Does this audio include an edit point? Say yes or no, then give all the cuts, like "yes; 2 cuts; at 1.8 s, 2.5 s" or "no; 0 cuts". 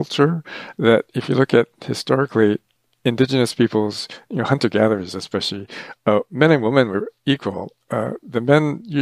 yes; 1 cut; at 2.7 s